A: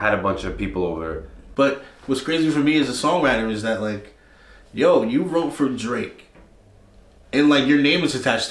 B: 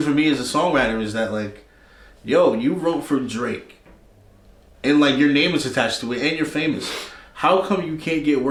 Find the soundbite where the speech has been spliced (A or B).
A